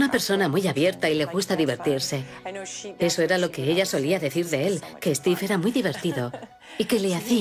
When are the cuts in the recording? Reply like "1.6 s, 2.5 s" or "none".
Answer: 4.6 s